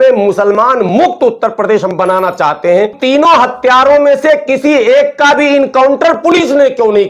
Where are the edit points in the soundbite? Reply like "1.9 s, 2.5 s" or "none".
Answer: 3.0 s